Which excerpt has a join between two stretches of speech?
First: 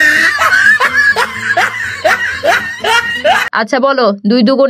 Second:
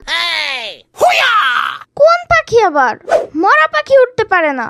first; 1 cut; at 3.5 s

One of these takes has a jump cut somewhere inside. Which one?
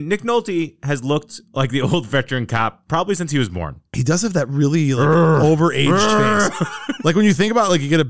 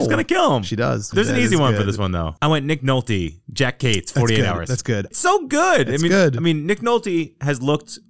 second; 3 cuts; at 1.1 s, 2.3 s, 5.1 s

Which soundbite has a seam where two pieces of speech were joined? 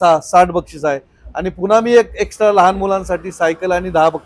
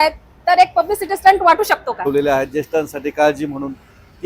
second; 1 cut; at 2.0 s

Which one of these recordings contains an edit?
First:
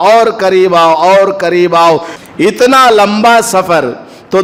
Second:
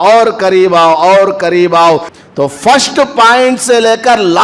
second; 1 cut; at 2.2 s

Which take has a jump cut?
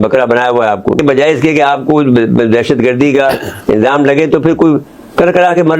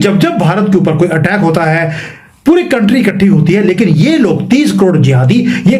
first; 1 cut; at 1.0 s

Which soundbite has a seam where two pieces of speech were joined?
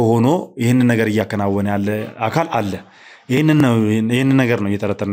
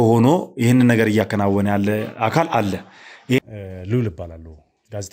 second; 1 cut; at 3.4 s

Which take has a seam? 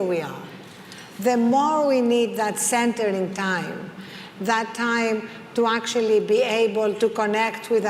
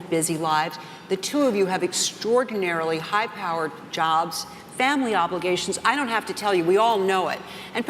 second; 1 cut; at 2.9 s

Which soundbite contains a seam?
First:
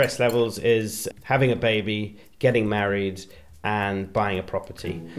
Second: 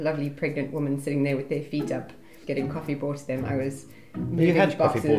second; 1 cut; at 2.4 s

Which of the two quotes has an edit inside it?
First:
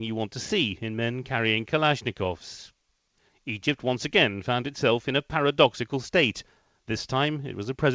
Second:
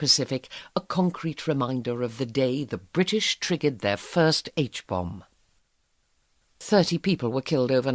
second; 1 cut; at 1.9 s

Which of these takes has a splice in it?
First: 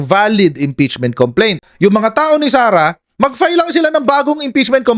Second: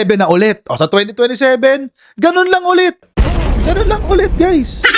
first; 1 cut; at 1.6 s

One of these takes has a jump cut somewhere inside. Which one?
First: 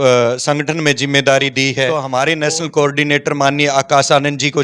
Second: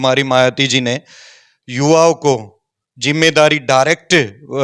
first; 1 cut; at 1.9 s

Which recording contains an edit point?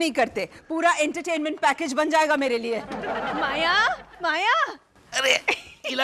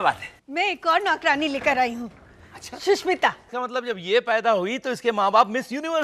second; 1 cut; at 3.5 s

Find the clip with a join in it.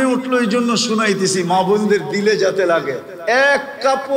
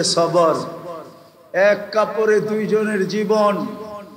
first; 1 cut; at 3.1 s

